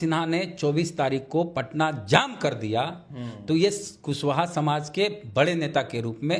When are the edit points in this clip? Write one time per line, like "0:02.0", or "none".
none